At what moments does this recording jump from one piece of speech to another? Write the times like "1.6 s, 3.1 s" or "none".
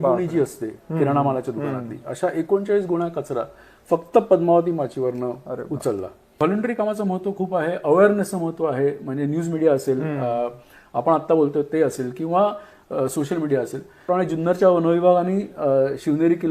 6.4 s, 14.1 s

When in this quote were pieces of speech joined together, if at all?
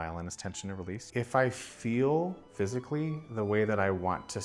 0.9 s, 2.4 s

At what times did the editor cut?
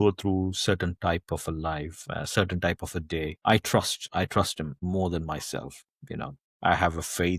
4.7 s, 6.4 s

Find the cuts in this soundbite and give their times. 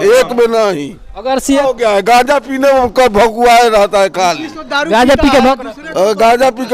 1.6 s

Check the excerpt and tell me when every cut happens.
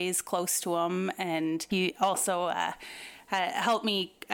1.7 s

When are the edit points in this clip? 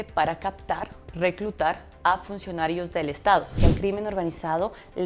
3.6 s

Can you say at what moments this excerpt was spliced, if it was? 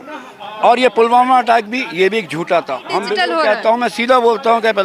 3.1 s

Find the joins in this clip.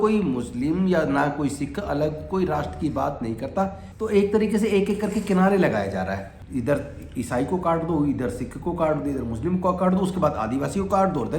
3.8 s, 6.3 s

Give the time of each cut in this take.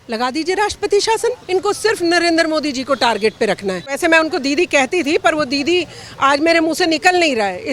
1.4 s, 4.0 s

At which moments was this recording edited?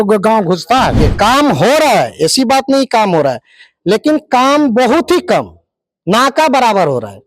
1.1 s

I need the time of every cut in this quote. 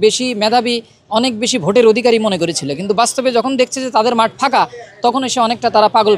none

